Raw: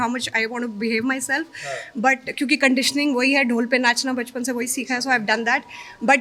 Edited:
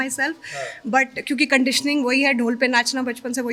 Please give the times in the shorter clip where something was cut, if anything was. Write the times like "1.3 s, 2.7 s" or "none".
none